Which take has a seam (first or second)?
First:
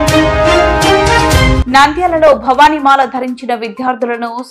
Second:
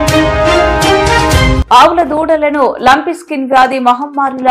second